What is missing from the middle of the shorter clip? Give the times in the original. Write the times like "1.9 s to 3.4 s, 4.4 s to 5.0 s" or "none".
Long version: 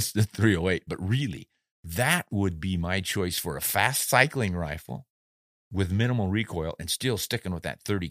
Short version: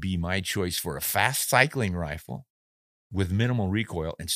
none

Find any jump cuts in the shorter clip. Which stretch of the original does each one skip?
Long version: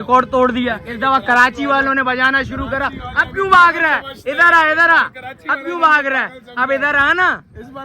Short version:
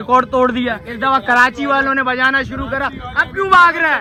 none

